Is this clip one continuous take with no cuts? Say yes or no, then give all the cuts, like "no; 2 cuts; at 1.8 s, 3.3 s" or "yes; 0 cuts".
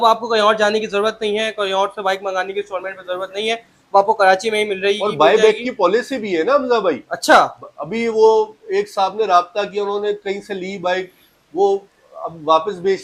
yes; 0 cuts